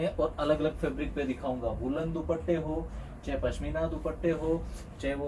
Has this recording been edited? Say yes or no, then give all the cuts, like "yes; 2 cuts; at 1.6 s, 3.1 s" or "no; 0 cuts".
no; 0 cuts